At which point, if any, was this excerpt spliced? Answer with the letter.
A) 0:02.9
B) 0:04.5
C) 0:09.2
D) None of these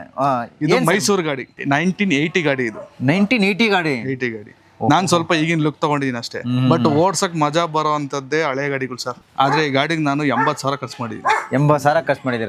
C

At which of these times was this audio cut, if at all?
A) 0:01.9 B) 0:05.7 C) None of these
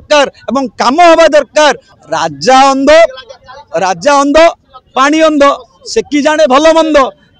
A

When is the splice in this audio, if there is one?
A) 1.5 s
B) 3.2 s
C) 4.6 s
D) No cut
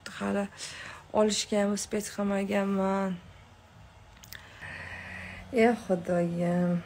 C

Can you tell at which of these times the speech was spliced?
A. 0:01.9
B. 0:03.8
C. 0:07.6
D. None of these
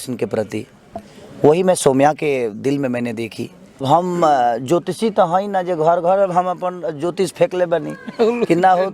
B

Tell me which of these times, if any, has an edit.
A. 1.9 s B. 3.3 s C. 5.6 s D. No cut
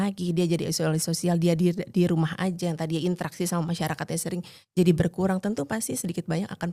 D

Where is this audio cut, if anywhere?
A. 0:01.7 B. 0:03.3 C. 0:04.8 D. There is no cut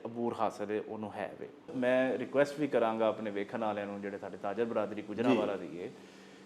A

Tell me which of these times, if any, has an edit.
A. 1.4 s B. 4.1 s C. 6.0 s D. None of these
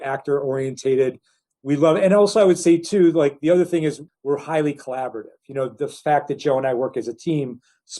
B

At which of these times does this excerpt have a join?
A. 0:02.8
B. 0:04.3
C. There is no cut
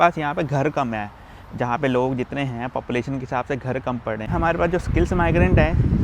B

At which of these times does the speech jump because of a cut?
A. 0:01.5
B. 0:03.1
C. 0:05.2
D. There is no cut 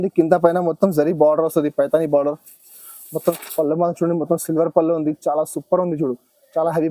B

